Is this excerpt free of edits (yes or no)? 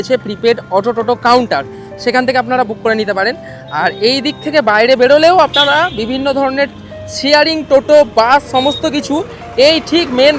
yes